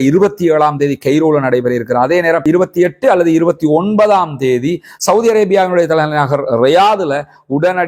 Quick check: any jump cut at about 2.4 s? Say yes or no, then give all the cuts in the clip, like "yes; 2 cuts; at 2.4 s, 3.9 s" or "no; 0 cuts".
no; 0 cuts